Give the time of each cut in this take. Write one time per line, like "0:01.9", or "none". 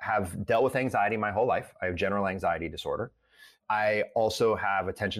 0:03.6